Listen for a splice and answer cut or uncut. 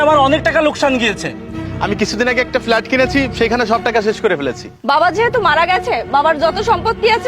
cut